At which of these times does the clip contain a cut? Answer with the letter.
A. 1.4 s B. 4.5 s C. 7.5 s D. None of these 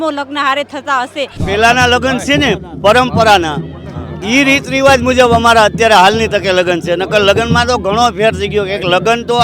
A